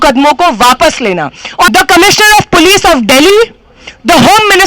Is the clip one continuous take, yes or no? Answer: no